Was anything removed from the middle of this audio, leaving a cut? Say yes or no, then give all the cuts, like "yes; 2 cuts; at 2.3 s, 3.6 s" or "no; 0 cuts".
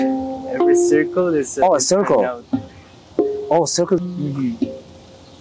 yes; 1 cut; at 4.1 s